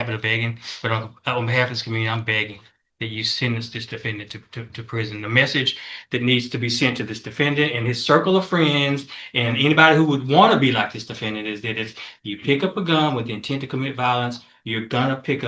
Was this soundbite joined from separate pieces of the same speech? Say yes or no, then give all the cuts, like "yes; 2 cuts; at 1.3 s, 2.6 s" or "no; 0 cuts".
no; 0 cuts